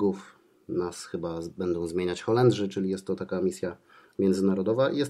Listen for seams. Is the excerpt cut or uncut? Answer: uncut